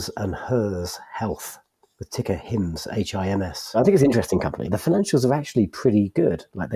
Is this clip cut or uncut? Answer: cut